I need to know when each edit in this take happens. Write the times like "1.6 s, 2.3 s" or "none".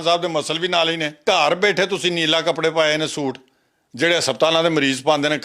1.2 s